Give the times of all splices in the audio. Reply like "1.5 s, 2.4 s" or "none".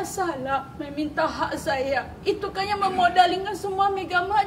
none

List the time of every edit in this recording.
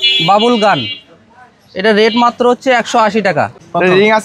3.3 s

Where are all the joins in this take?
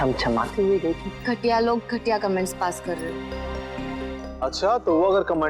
1.1 s, 4.3 s

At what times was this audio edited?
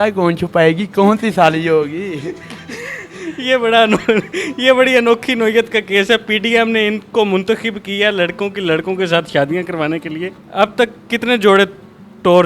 none

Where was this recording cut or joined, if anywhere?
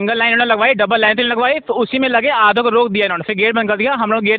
none

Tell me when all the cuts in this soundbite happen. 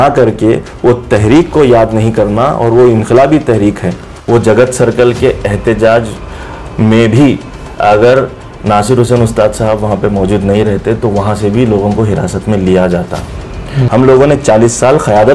4.1 s, 13.7 s

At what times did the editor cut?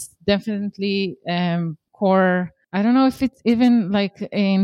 1.8 s, 2.6 s

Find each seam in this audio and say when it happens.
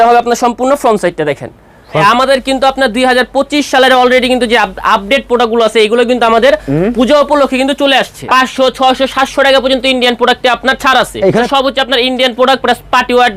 2.0 s, 8.1 s, 11.5 s

